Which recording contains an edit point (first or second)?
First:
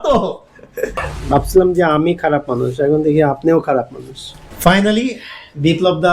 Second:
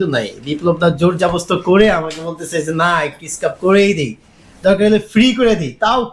first